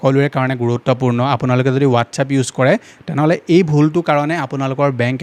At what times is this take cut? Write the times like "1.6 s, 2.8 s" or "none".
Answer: none